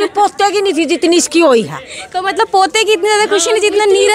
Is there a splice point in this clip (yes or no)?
no